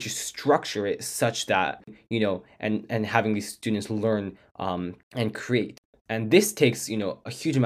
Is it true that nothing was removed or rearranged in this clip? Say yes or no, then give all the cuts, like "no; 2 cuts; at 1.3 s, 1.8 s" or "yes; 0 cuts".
no; 3 cuts; at 1.9 s, 5.0 s, 5.8 s